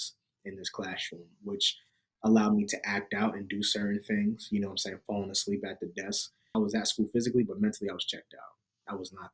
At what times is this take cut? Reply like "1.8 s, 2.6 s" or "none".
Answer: 6.5 s